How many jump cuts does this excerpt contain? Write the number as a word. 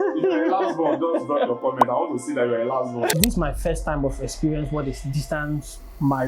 one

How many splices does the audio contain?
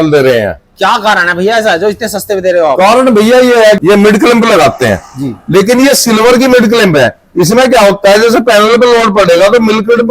one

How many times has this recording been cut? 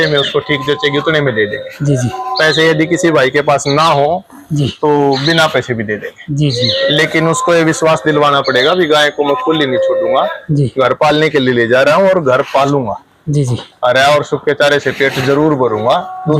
zero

